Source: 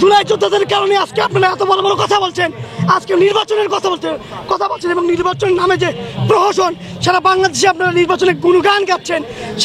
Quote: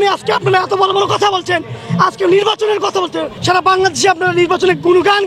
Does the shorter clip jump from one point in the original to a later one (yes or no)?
yes